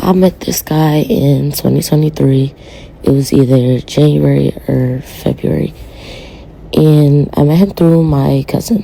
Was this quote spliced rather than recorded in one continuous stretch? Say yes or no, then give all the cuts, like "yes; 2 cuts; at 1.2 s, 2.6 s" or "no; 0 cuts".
no; 0 cuts